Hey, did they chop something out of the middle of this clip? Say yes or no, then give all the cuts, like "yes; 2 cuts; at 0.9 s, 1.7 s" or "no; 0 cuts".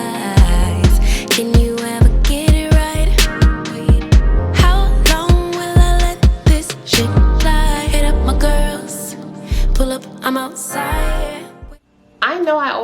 yes; 1 cut; at 11.5 s